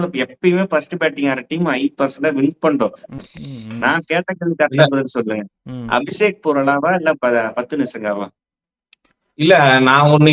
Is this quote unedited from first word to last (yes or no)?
no